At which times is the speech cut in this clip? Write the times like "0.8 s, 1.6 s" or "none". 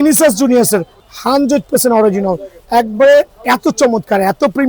1.0 s